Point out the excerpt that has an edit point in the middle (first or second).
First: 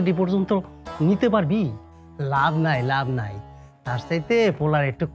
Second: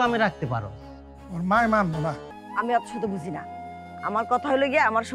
second